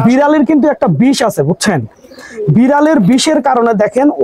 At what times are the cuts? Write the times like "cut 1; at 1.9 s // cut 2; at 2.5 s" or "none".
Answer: none